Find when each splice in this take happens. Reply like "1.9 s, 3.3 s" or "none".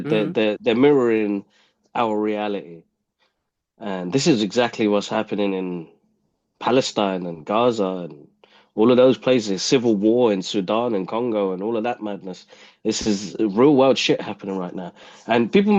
none